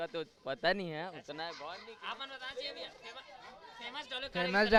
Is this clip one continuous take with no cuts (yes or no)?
yes